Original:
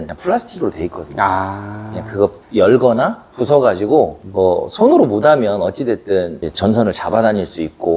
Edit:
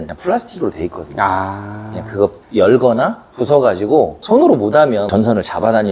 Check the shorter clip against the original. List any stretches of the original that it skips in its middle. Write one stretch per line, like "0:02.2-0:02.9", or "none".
0:04.2-0:04.7
0:05.6-0:06.6